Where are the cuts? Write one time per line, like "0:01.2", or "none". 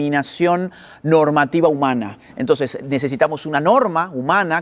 none